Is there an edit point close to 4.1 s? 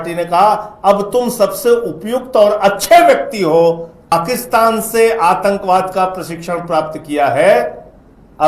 yes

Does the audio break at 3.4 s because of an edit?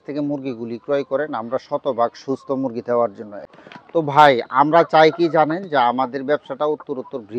yes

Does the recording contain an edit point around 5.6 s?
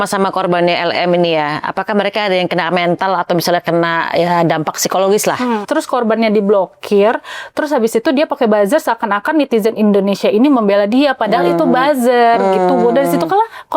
yes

